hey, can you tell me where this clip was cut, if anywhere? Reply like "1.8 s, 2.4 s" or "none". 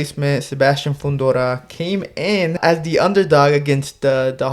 2.6 s